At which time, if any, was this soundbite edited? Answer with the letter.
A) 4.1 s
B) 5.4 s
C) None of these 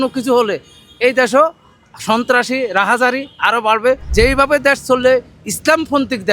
A